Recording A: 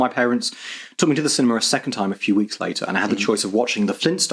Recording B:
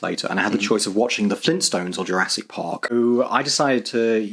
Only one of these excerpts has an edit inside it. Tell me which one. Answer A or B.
B